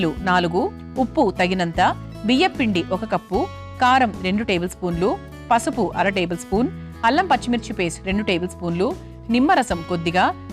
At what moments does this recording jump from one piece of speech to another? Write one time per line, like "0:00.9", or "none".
0:02.0